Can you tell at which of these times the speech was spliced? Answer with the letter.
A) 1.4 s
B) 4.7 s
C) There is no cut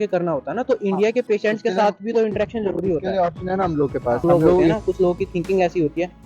B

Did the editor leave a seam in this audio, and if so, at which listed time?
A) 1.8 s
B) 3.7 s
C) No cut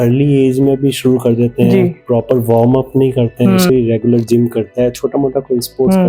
B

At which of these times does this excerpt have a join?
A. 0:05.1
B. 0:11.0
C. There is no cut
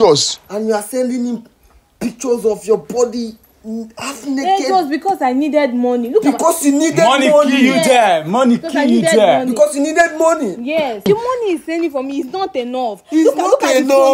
B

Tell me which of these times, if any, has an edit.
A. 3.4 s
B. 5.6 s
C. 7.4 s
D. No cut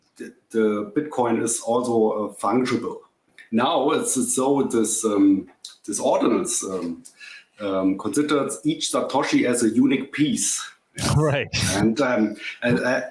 A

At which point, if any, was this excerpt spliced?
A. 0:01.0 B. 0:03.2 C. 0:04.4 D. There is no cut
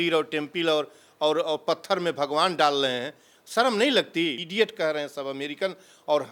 C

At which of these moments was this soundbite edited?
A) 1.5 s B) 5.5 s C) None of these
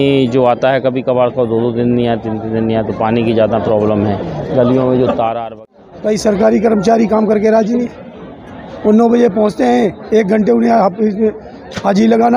B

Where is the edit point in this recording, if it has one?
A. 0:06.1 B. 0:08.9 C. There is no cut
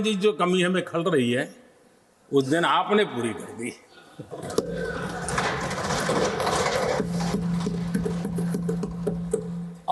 C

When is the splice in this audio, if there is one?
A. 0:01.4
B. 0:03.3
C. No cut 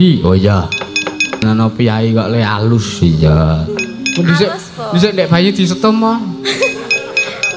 A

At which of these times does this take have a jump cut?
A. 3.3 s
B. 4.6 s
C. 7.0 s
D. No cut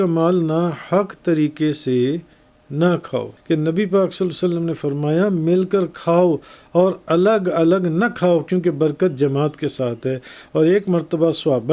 A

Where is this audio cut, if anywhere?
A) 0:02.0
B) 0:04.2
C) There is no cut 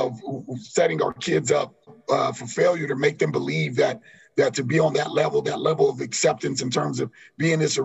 A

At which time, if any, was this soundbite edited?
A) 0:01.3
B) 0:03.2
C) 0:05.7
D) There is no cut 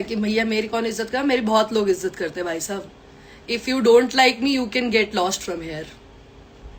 D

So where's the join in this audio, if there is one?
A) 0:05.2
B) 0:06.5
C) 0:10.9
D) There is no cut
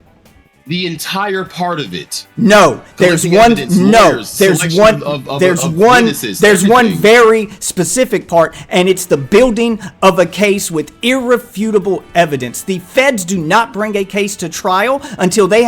D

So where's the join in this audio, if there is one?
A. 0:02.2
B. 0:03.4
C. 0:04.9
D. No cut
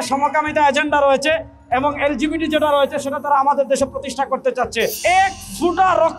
C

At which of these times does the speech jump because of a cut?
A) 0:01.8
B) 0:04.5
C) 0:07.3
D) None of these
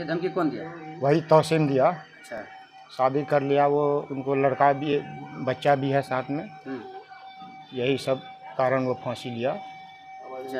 D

